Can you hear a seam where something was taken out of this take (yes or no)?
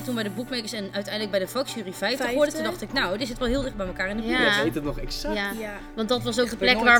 no